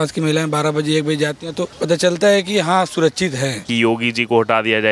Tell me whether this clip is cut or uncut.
cut